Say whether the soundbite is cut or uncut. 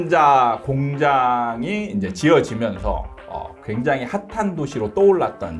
uncut